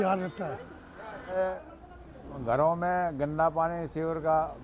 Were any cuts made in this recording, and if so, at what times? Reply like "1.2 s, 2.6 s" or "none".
1.3 s